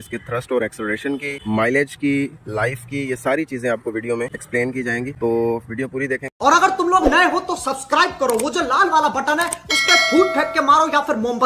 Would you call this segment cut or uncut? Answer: cut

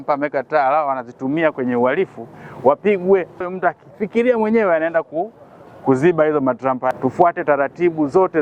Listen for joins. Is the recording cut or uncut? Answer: cut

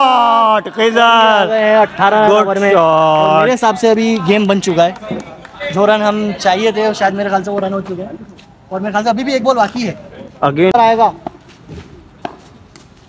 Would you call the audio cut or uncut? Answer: cut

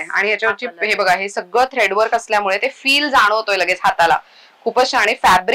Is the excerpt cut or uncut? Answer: uncut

